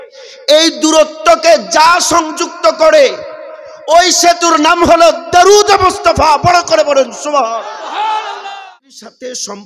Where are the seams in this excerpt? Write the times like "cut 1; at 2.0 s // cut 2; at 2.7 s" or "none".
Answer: cut 1; at 8.7 s